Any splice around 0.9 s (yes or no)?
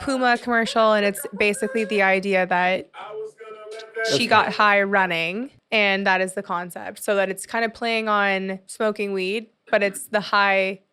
no